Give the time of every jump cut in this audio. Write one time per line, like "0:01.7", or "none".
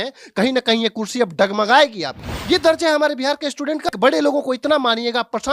0:02.3
0:03.9

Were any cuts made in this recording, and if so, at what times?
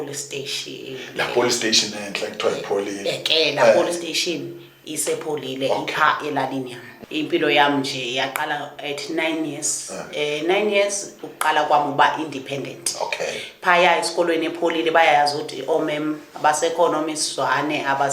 0:06.9

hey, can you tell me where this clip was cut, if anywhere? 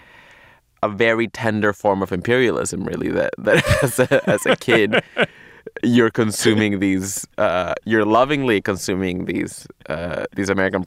none

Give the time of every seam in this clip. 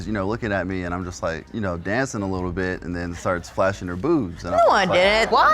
0:01.4

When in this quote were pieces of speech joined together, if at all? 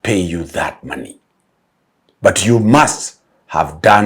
none

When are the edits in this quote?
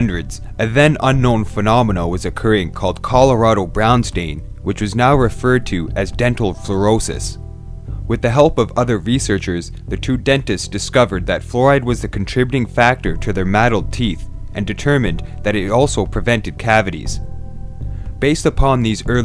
none

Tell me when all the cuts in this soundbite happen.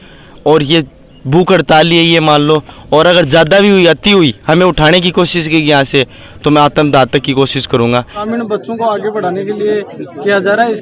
0:08.3

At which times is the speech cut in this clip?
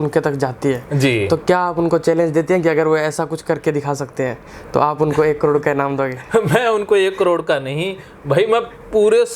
none

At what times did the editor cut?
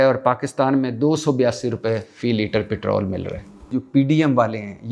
0:03.7

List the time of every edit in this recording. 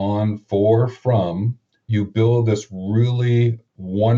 none

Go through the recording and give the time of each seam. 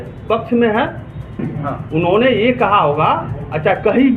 0:01.2

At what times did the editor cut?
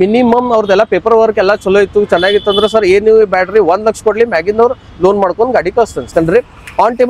0:06.1

